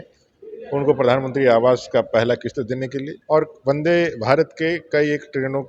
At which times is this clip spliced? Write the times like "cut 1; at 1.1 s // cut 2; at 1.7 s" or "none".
none